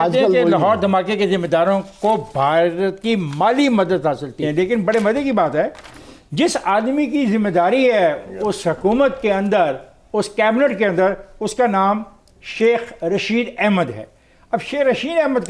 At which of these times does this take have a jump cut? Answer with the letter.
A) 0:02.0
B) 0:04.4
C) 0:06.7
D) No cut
B